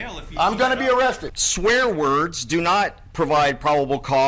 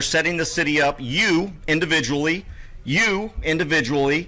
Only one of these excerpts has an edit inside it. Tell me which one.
first; 1 cut; at 1.3 s

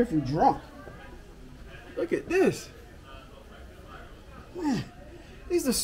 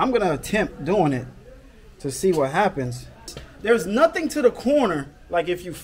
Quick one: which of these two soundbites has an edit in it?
second; 1 cut; at 3.4 s

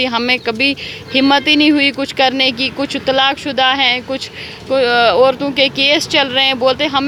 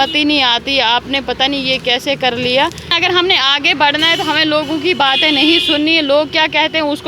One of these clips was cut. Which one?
second; 1 cut; at 3.0 s

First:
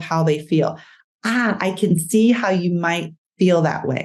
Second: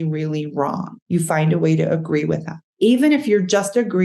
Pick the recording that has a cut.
second; 2 cuts; at 0.9 s, 2.6 s

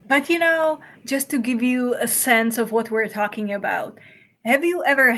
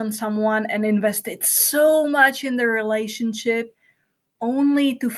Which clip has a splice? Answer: first; 1 cut; at 0.9 s

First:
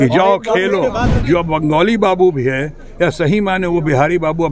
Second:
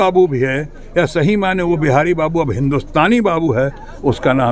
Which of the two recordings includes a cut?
first; 1 cut; at 1.1 s

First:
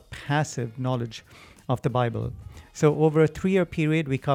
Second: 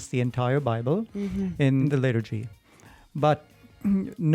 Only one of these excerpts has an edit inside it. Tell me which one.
second; 1 cut; at 1.9 s

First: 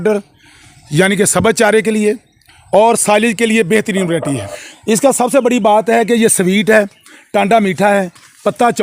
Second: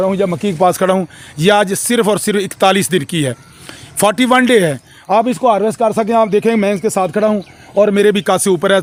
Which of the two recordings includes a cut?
first; 1 cut; at 4.4 s

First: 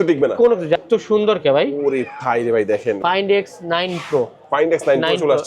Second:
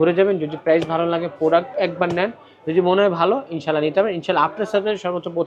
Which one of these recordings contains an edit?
first; 2 cuts; at 0.8 s, 3.0 s

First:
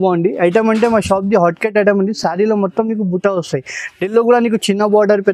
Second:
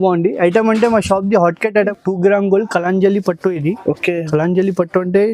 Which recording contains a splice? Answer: second; 1 cut; at 1.9 s

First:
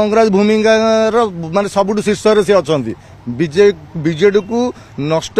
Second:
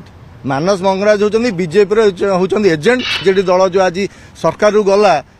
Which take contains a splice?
second; 1 cut; at 3.2 s

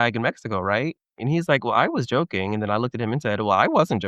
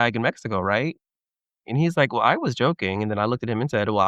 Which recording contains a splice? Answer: first; 1 cut; at 1.1 s

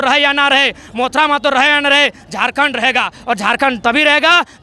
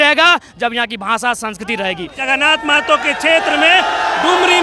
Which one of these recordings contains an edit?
second; 1 cut; at 2.2 s

